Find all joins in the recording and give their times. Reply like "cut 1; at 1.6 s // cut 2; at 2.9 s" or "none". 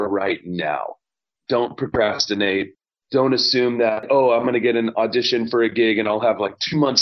cut 1; at 1.2 s // cut 2; at 4.0 s